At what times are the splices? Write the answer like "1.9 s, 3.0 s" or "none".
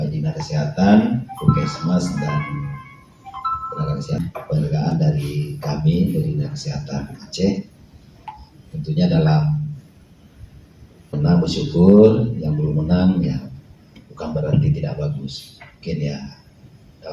4.2 s, 11.1 s

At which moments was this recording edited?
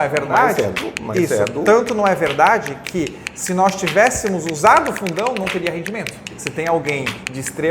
6.4 s

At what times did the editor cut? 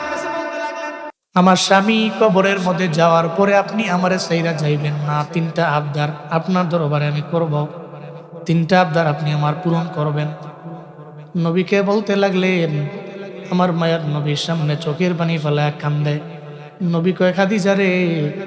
1.1 s

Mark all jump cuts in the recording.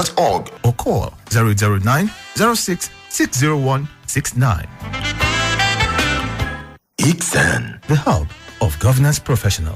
5.7 s

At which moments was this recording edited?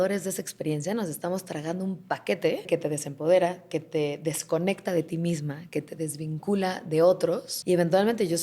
2.7 s, 7.5 s

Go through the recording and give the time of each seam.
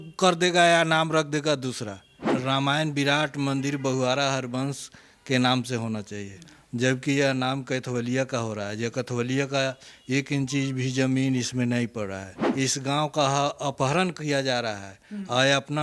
2.3 s, 12.3 s

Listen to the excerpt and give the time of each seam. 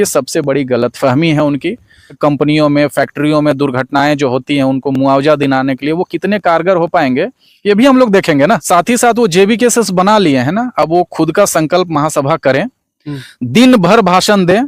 2.2 s, 8.6 s

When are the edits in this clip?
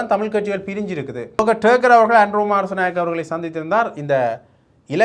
1.4 s

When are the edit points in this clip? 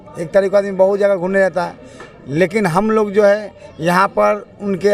none

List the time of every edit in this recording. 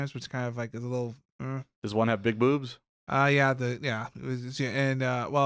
none

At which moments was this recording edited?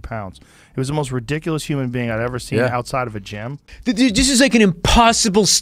3.7 s

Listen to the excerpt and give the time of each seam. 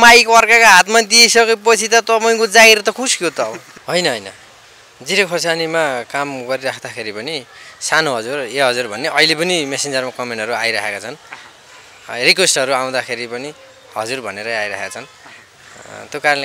3.7 s

